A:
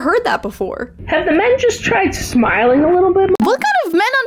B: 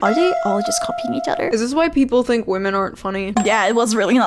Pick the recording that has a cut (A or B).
B